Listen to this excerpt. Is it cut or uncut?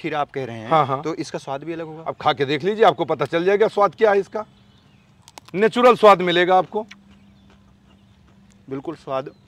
uncut